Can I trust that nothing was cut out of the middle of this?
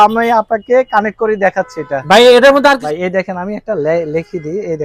no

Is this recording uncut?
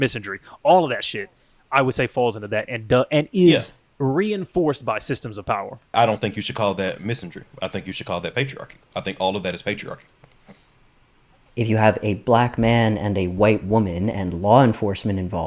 no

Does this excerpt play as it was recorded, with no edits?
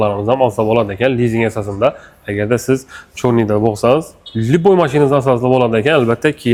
yes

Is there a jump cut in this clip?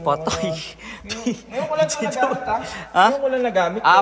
no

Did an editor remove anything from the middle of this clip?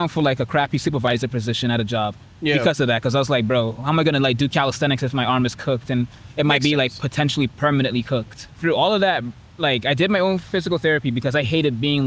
no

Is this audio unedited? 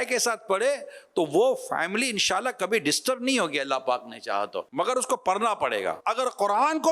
no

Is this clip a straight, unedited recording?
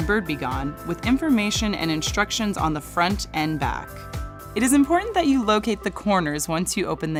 yes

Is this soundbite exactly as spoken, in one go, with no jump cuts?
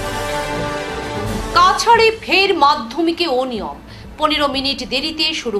yes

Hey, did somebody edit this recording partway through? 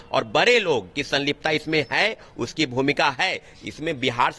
no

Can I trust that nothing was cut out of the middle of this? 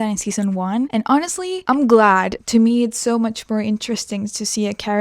no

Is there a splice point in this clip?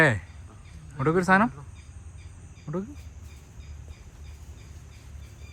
no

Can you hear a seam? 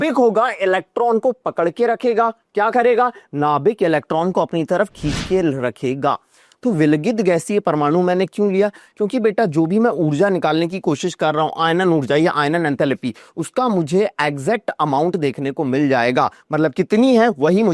no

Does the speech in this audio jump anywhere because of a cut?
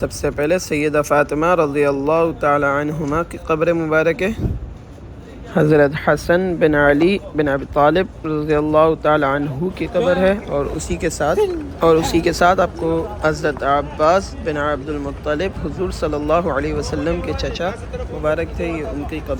no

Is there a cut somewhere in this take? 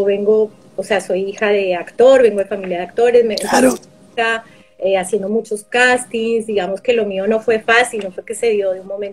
no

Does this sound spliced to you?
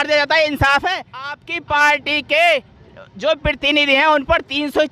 yes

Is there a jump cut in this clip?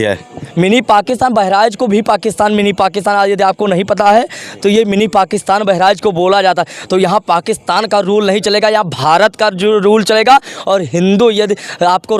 no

